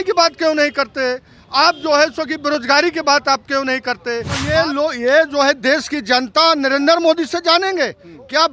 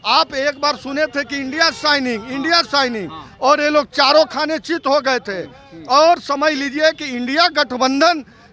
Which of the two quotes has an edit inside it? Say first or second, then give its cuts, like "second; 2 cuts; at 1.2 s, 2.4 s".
first; 1 cut; at 4.4 s